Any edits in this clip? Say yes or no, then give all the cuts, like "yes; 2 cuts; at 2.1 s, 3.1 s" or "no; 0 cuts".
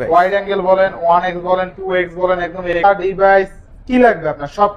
yes; 1 cut; at 2.8 s